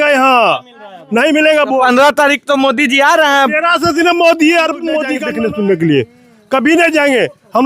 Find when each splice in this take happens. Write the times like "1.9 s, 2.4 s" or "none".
5.1 s